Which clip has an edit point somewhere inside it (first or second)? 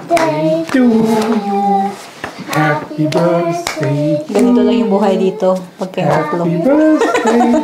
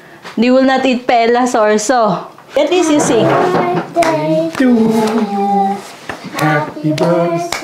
second